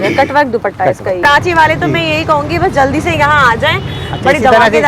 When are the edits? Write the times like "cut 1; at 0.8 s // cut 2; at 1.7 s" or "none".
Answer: cut 1; at 1.2 s